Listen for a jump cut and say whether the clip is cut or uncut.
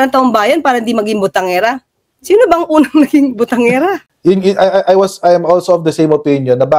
cut